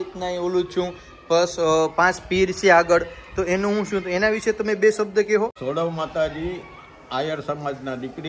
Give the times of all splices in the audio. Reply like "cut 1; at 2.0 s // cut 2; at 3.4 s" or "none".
cut 1; at 5.6 s